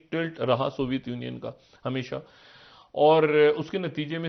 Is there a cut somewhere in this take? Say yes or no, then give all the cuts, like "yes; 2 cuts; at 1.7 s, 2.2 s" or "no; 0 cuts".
no; 0 cuts